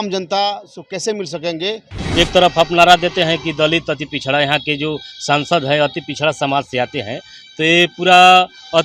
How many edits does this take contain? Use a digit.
1